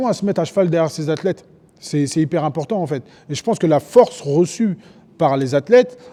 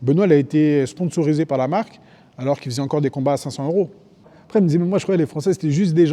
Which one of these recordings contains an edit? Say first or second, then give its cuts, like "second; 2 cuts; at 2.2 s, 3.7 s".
second; 1 cut; at 4.3 s